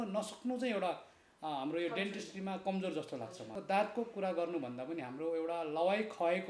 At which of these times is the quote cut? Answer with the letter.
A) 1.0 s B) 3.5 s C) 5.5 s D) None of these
B